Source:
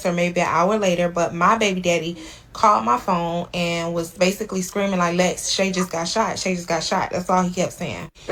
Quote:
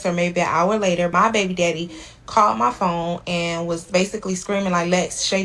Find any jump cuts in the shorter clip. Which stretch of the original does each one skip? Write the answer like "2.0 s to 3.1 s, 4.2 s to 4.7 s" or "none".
1.1 s to 1.4 s